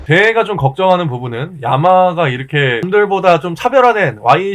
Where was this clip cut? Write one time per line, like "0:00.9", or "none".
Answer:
0:02.9